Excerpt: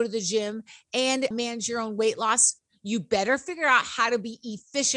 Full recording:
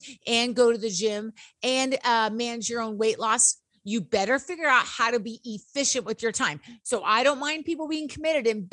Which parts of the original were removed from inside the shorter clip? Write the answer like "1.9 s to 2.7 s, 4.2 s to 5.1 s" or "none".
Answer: 2.0 s to 2.3 s